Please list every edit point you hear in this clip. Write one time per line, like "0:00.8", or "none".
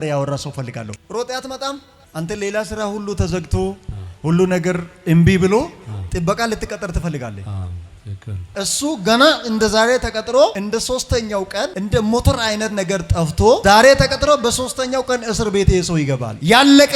0:01.9
0:08.5